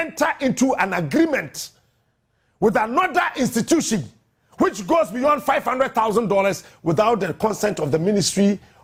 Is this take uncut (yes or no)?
yes